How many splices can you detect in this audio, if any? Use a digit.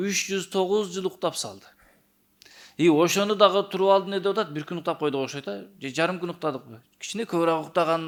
0